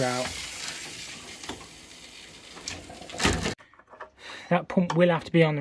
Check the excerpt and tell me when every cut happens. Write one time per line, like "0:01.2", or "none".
0:03.6